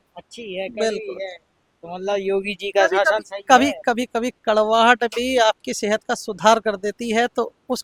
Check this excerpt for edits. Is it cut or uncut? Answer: uncut